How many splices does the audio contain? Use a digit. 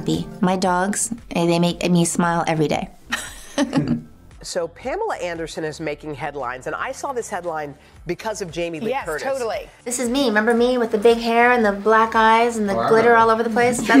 2